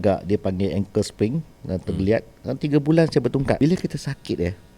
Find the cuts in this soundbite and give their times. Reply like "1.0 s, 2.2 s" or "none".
3.6 s

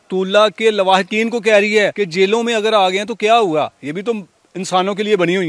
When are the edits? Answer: 1.9 s

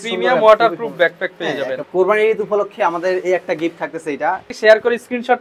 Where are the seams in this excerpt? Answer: 1.8 s, 4.5 s

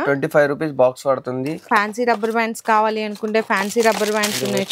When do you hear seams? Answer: 1.6 s

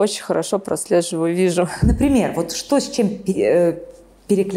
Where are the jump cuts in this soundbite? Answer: none

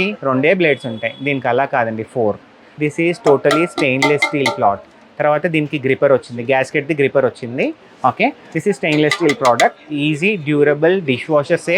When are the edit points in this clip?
2.6 s, 8.5 s

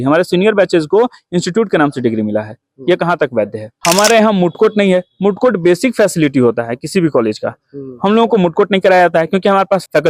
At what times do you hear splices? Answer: 3.7 s

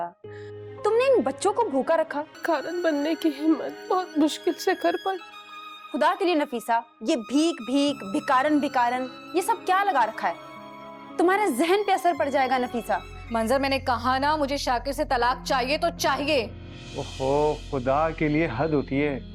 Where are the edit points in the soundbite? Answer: 2.3 s, 13.2 s

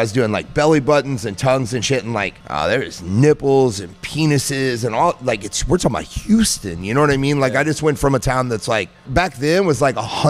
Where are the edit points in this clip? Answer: 2.4 s, 9.1 s

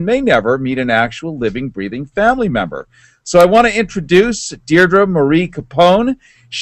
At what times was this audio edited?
1.1 s

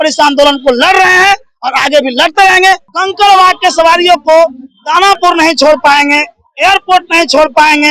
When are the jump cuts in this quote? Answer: 2.9 s

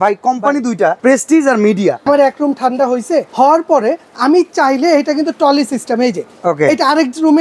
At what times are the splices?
1.0 s, 2.0 s, 3.3 s

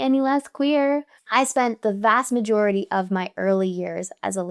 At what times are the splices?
1.2 s

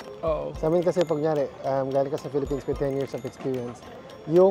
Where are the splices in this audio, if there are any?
none

